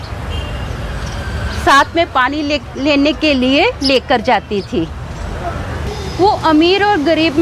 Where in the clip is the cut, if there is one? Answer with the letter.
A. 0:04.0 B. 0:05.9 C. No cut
B